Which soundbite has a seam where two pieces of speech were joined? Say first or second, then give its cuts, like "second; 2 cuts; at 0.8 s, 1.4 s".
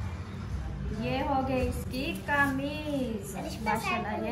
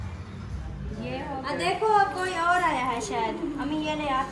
second; 1 cut; at 1.4 s